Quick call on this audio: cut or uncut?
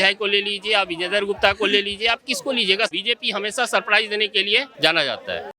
cut